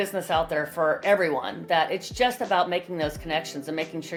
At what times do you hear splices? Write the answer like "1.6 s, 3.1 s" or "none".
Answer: none